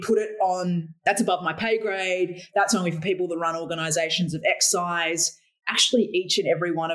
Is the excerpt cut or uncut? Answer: cut